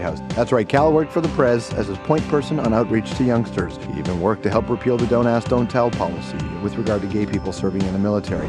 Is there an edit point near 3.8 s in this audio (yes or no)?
yes